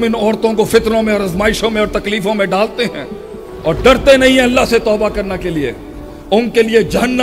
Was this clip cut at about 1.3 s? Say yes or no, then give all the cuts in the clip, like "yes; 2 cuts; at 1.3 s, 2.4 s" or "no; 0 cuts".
no; 0 cuts